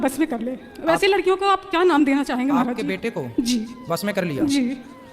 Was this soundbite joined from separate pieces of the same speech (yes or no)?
no